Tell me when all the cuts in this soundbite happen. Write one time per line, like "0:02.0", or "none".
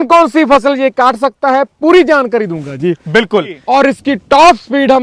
0:03.6

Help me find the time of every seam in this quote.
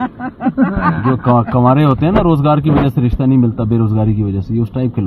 none

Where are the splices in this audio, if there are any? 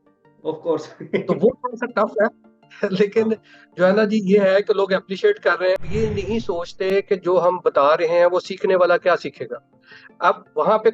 0:05.8

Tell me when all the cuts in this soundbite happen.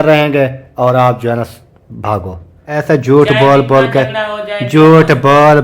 0:02.7

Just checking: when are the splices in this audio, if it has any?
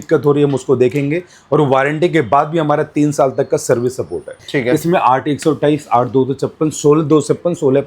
0:04.4

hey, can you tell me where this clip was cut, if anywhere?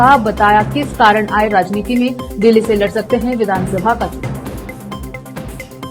none

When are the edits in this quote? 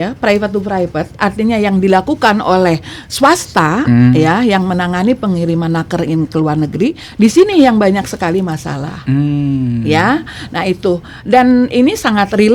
none

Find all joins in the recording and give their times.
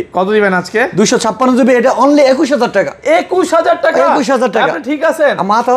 none

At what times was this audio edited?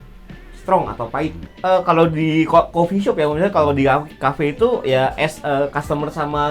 0:01.4

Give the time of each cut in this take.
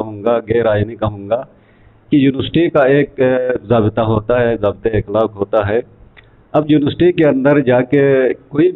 none

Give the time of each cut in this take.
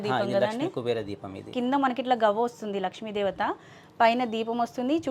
none

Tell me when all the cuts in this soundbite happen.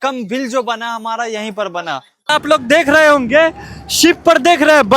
0:02.3

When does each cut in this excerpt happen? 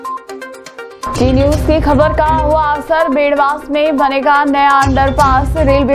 none

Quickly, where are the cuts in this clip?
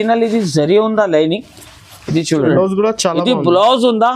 0:02.5

